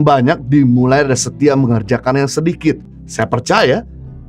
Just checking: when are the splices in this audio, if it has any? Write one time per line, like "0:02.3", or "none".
0:02.9